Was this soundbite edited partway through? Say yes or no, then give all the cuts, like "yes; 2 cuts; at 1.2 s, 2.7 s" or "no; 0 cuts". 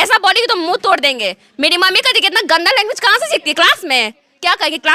no; 0 cuts